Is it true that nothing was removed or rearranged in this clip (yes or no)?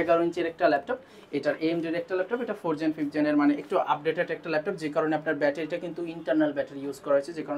yes